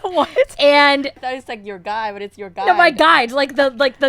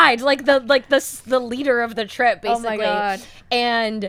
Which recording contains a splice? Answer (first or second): first